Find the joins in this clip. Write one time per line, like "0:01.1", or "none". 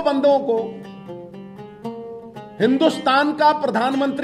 none